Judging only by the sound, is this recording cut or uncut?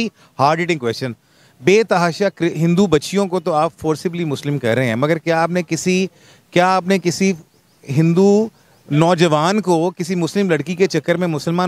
uncut